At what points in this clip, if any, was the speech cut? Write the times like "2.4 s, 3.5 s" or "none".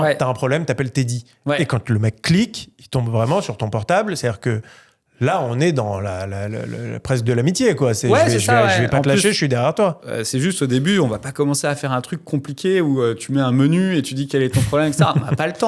none